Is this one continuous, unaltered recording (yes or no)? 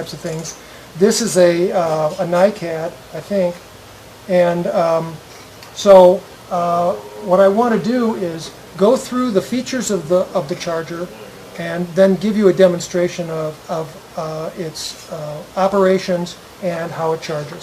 no